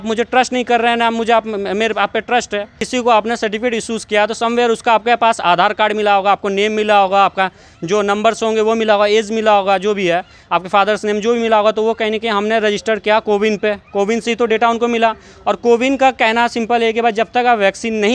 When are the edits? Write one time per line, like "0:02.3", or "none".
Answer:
0:02.8